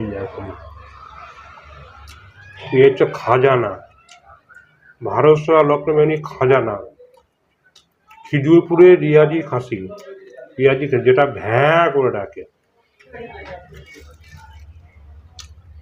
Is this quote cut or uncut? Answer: cut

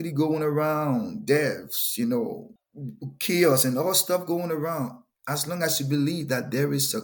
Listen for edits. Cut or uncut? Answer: cut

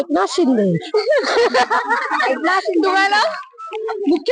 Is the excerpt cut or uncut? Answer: uncut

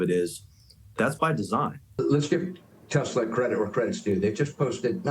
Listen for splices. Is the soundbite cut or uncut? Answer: cut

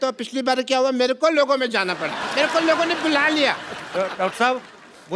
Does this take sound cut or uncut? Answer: cut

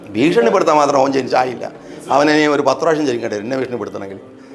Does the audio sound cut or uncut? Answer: uncut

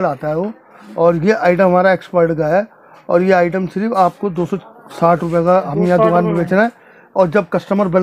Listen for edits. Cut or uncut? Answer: uncut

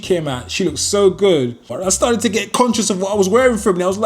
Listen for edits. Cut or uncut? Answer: cut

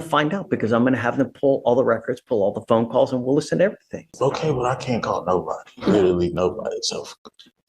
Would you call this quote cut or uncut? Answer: cut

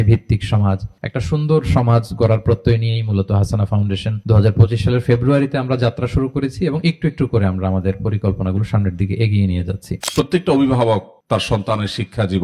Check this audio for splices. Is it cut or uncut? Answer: cut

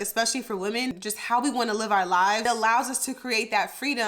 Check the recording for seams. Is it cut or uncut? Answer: cut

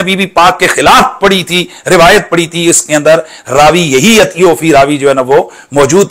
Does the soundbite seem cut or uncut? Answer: uncut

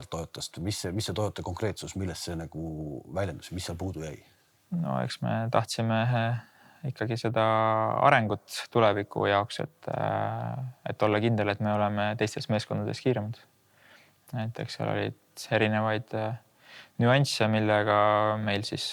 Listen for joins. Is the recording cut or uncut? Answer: uncut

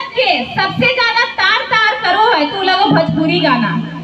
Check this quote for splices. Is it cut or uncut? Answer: uncut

